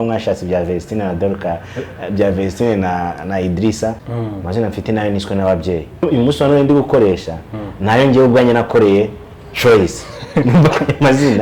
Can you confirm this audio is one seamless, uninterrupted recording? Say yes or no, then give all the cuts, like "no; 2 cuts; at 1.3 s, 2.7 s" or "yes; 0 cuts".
no; 2 cuts; at 4.0 s, 6.0 s